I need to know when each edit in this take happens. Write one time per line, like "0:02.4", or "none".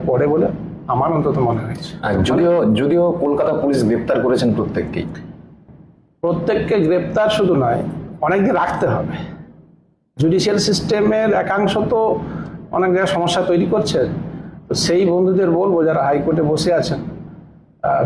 none